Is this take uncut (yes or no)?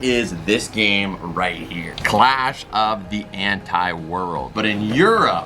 no